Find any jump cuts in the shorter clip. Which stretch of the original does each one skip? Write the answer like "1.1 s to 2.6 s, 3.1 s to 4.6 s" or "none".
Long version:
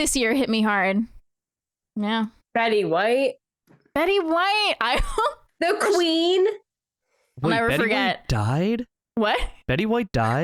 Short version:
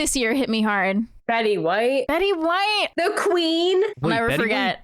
1.2 s to 2.4 s, 3.3 s to 3.9 s, 4.8 s to 5.5 s, 6.6 s to 7.4 s